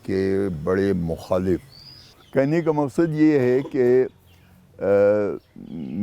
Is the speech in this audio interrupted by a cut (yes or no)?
yes